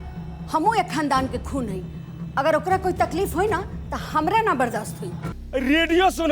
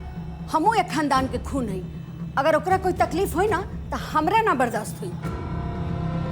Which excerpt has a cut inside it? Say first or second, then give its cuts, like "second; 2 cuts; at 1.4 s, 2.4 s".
first; 1 cut; at 5.3 s